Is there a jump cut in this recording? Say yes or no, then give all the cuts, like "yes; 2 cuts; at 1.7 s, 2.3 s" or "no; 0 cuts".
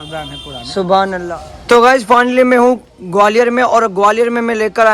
yes; 1 cut; at 1.2 s